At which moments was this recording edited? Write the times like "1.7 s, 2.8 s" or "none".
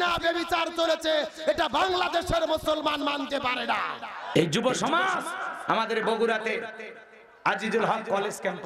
4.2 s